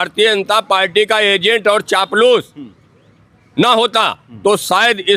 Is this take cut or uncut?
uncut